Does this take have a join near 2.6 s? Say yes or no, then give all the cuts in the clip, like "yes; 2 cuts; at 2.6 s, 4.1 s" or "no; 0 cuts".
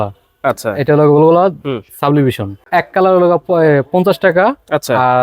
yes; 1 cut; at 2.6 s